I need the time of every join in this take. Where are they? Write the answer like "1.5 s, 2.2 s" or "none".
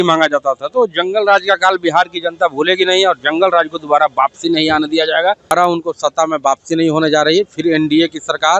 5.5 s